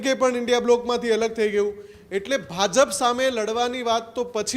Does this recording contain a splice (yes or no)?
no